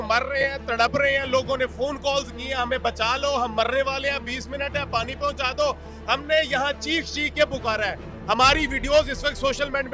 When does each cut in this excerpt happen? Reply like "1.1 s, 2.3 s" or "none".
none